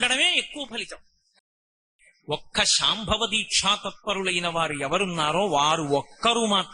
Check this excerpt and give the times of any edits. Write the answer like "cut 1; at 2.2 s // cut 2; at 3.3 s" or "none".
cut 1; at 1.7 s